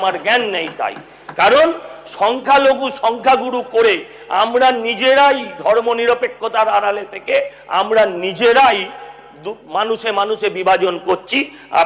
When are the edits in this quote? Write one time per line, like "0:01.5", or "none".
none

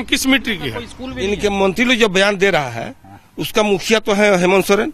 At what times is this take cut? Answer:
0:01.0

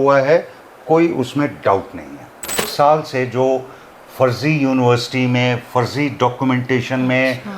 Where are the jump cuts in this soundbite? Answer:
0:02.6

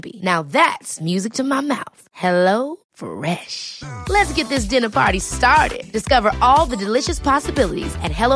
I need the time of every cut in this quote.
none

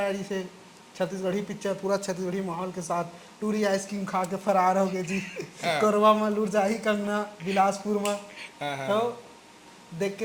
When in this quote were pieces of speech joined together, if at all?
none

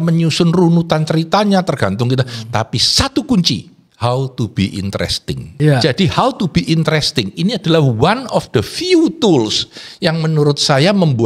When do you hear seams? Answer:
0:03.8
0:05.4

